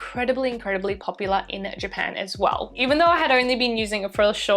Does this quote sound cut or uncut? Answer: cut